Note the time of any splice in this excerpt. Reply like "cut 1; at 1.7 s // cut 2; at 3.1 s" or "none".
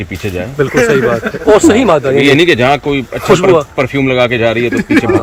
none